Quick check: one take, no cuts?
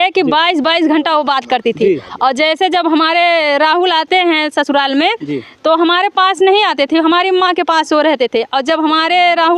yes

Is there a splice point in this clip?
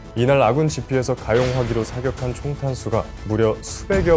yes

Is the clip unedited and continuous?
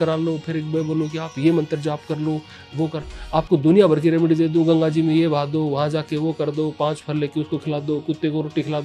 yes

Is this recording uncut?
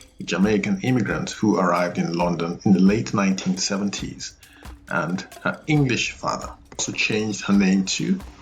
no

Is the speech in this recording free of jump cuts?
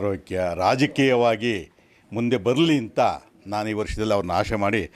yes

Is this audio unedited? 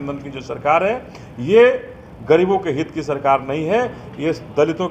yes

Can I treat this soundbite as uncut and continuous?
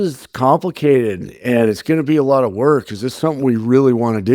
yes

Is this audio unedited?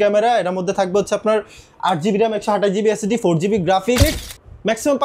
no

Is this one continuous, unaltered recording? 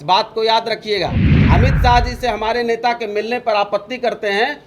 no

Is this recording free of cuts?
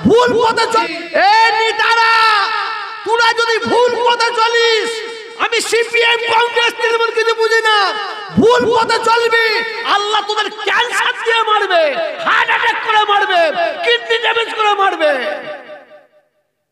yes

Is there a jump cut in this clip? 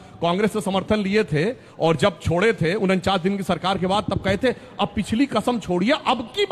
no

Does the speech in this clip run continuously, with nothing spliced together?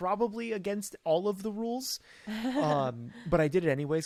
yes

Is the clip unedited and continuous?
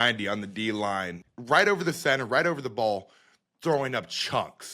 no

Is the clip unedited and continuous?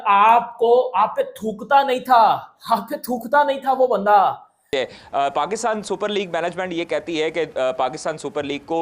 no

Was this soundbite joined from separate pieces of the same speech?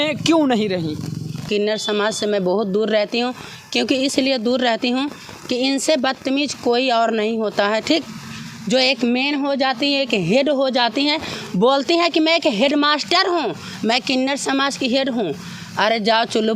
yes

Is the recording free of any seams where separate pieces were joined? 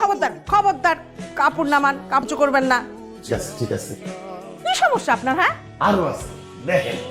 yes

